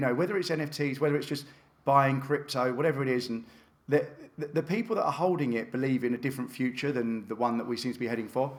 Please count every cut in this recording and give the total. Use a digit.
0